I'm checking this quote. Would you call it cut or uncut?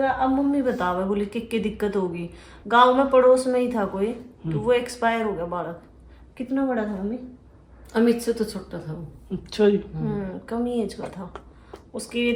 uncut